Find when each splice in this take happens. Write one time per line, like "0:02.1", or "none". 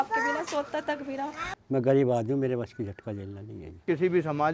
0:01.5
0:03.8